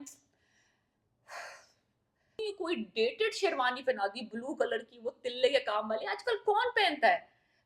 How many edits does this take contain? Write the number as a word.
one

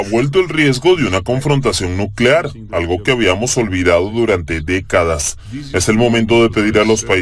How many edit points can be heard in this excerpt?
one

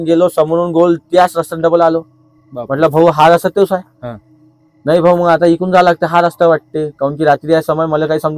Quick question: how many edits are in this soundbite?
zero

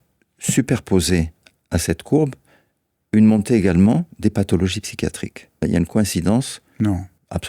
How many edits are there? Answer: one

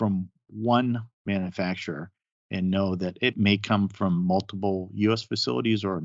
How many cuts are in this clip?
one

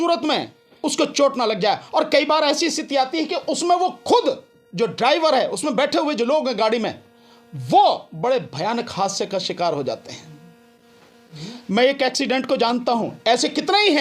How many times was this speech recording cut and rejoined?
zero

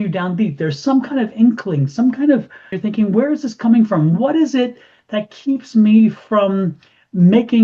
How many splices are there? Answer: one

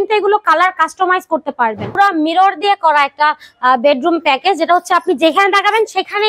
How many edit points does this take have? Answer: one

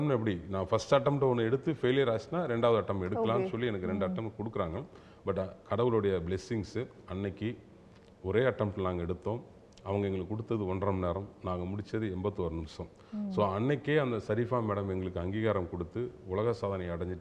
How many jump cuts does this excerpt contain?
zero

